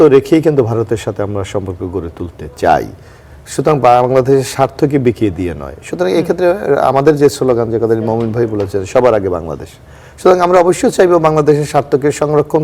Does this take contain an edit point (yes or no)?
no